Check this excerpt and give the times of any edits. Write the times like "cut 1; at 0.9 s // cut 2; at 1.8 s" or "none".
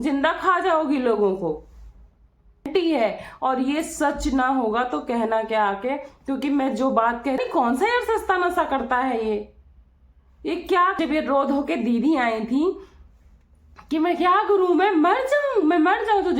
cut 1; at 2.7 s // cut 2; at 7.4 s // cut 3; at 11.0 s